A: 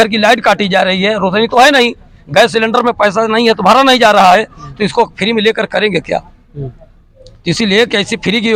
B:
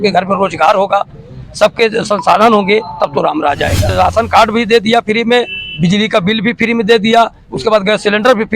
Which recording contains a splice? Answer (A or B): B